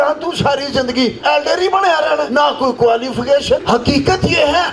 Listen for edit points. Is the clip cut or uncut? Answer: cut